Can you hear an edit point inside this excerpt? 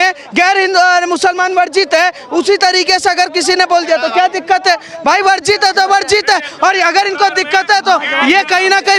no; 0 cuts

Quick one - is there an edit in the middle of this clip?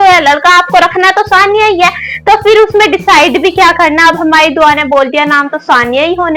no; 0 cuts

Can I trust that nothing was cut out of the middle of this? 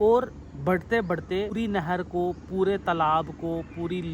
no; 1 cut; at 1.5 s

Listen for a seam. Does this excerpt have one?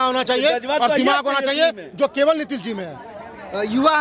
no; 0 cuts

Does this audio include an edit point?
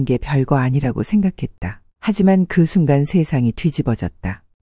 no; 0 cuts

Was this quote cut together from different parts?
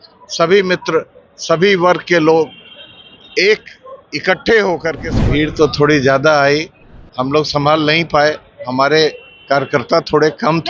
yes; 1 cut; at 5.1 s

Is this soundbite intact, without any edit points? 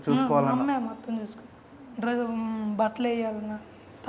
yes; 0 cuts

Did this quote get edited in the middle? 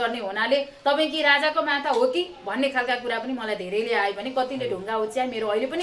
no; 0 cuts

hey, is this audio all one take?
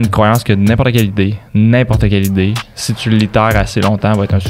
yes; 0 cuts

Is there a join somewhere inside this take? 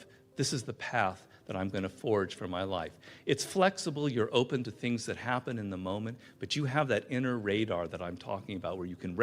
no; 0 cuts

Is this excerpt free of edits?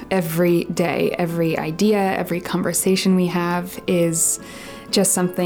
yes; 0 cuts

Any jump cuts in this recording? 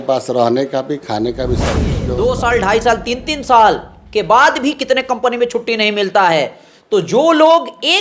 yes; 1 cut; at 2.0 s

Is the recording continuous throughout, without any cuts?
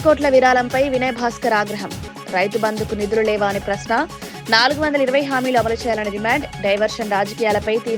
yes; 0 cuts

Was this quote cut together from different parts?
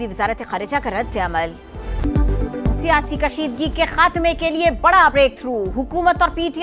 yes; 1 cut; at 2.0 s

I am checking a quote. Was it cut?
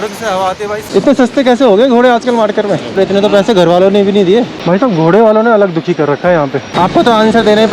yes; 4 cuts; at 0.8 s, 2.9 s, 4.5 s, 6.6 s

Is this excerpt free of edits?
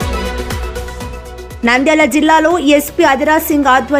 no; 1 cut; at 1.5 s

